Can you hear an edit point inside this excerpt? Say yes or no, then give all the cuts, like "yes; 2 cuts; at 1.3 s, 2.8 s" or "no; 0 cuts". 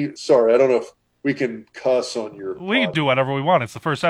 yes; 1 cut; at 2.9 s